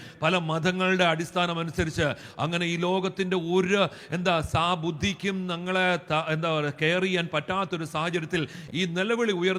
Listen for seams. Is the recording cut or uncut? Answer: uncut